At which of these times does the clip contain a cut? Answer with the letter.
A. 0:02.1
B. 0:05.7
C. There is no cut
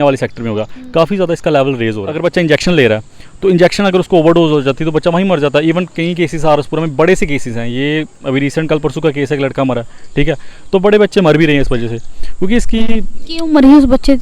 A